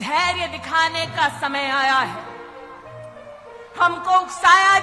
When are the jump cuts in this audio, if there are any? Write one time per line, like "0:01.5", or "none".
none